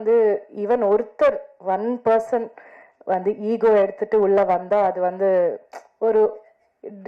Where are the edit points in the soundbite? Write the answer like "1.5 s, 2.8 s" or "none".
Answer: none